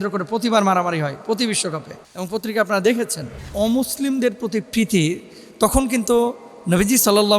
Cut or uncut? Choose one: cut